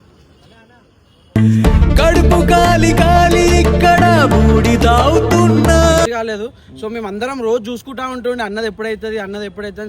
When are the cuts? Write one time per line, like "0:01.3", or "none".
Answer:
0:06.1